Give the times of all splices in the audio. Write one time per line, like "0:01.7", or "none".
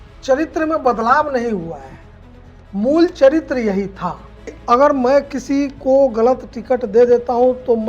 0:04.6